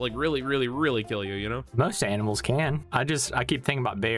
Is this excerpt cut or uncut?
cut